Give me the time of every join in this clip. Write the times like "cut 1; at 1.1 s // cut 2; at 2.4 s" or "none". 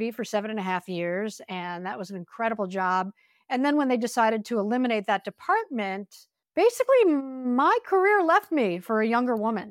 none